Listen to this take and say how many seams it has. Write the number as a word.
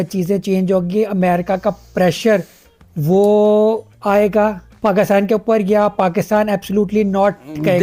zero